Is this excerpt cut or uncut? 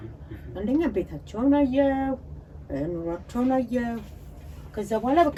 uncut